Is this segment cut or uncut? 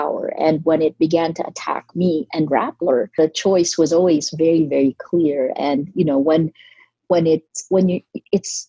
cut